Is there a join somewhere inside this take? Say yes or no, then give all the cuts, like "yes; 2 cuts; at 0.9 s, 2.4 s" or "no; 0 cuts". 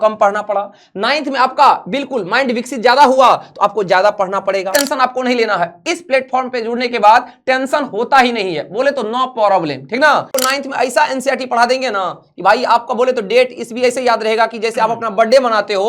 yes; 2 cuts; at 4.7 s, 10.3 s